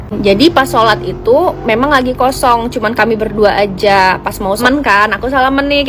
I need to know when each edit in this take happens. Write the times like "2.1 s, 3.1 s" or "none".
4.6 s